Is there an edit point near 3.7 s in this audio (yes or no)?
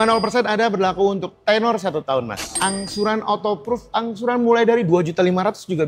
no